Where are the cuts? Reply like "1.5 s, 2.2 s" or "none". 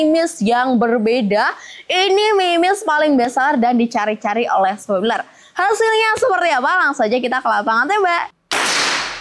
8.3 s